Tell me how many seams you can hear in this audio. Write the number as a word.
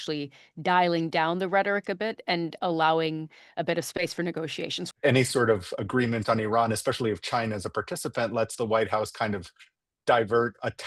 one